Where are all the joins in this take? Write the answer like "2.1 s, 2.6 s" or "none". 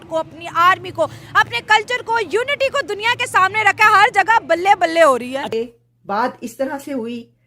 5.5 s